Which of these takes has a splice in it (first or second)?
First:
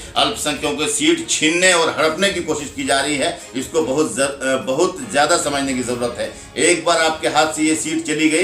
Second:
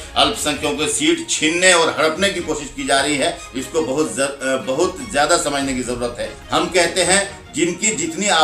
second